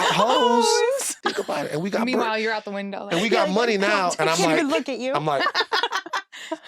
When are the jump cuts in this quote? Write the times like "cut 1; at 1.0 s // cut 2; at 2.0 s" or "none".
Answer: cut 1; at 1.1 s